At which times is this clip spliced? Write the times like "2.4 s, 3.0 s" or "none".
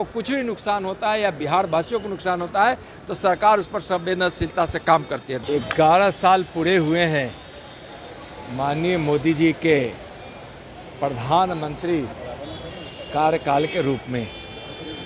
5.4 s